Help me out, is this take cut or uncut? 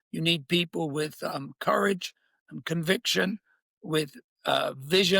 uncut